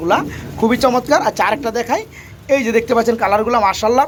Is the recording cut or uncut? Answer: uncut